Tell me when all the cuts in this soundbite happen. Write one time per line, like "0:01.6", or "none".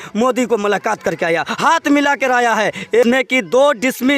0:03.0